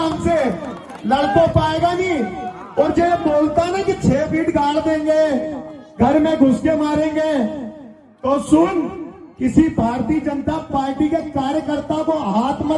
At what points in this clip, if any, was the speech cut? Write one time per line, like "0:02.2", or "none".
none